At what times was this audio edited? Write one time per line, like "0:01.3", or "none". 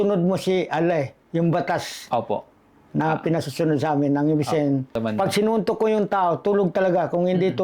0:05.0